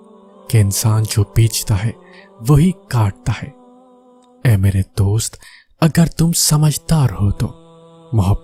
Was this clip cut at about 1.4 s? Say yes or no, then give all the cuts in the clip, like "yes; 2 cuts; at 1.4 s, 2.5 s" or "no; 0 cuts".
no; 0 cuts